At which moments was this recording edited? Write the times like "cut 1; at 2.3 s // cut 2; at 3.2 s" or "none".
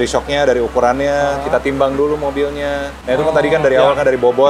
cut 1; at 2.9 s